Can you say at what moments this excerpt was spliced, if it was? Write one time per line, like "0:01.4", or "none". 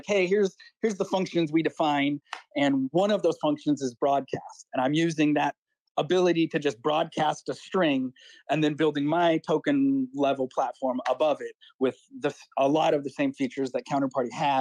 none